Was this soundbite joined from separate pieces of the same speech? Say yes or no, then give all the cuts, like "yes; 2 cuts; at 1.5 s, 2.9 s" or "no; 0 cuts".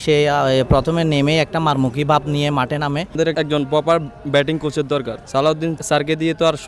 yes; 2 cuts; at 3.2 s, 5.7 s